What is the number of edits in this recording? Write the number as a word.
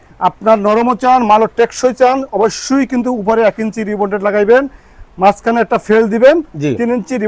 zero